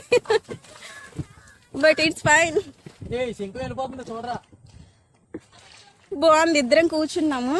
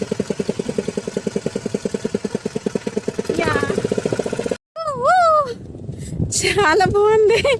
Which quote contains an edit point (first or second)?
second